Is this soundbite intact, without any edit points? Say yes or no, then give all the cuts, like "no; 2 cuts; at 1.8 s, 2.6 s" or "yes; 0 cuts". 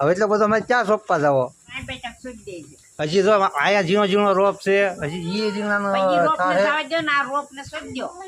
no; 1 cut; at 1.8 s